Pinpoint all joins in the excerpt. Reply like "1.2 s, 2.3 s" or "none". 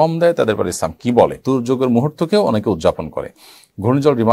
1.4 s